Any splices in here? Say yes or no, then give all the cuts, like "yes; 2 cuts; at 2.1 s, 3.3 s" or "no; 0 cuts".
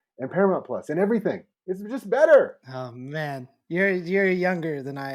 no; 0 cuts